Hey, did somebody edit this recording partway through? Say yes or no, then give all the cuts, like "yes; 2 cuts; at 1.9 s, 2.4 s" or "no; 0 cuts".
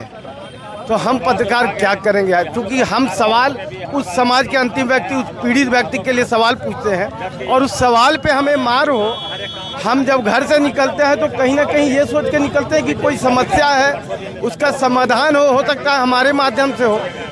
no; 0 cuts